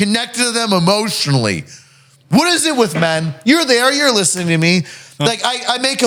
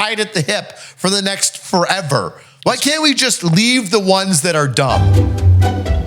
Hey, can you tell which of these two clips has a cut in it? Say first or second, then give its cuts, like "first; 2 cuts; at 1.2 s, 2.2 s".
second; 1 cut; at 5.1 s